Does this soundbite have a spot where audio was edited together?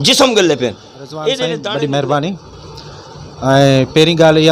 yes; 1 cut; at 1.6 s

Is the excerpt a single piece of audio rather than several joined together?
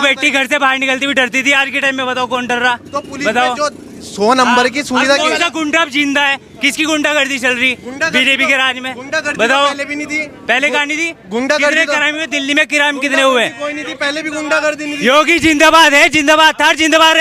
yes; 0 cuts

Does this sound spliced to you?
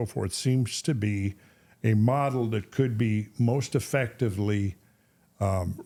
no; 0 cuts

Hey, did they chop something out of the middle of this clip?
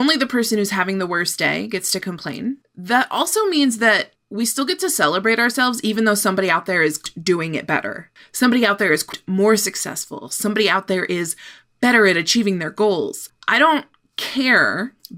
no; 0 cuts

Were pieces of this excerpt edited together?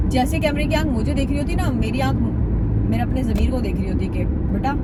no; 0 cuts

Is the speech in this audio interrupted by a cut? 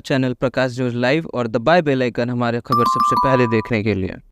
no; 0 cuts

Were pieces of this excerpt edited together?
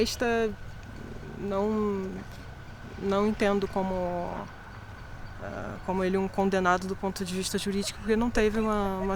no; 0 cuts

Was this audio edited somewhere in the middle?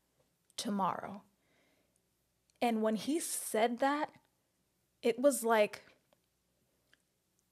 no; 0 cuts

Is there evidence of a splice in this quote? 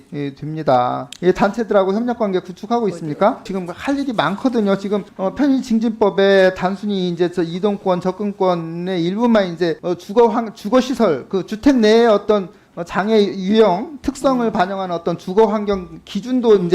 yes; 3 cuts; at 1.1 s, 3.4 s, 9.8 s

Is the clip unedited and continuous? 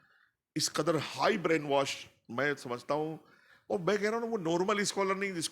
yes; 0 cuts

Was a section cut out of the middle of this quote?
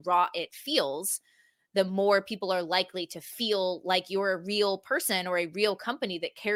no; 0 cuts

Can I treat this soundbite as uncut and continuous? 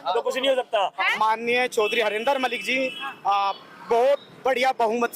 no; 1 cut; at 1.1 s

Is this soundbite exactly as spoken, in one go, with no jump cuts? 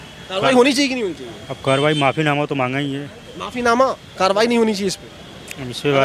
yes; 0 cuts

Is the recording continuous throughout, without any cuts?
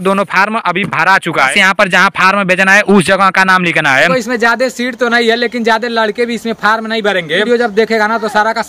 no; 3 cuts; at 1.5 s, 4.1 s, 7.5 s

